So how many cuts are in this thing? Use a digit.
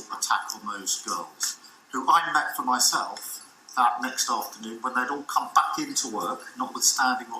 1